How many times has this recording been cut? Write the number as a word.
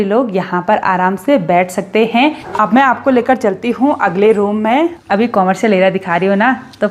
two